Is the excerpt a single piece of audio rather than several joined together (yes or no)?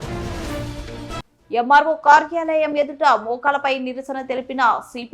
no